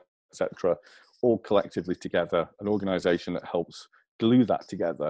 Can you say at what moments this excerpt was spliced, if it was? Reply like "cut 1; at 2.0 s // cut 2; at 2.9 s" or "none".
none